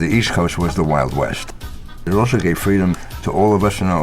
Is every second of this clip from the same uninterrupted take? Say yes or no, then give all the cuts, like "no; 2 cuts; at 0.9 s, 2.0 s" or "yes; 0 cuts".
no; 2 cuts; at 1.5 s, 3.1 s